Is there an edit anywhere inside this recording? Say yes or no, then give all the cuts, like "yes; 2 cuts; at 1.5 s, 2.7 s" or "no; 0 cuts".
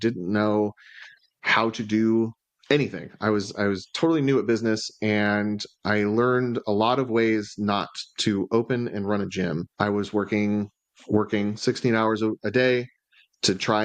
no; 0 cuts